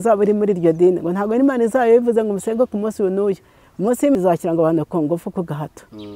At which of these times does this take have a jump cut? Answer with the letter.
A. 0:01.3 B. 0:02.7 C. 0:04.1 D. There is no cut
C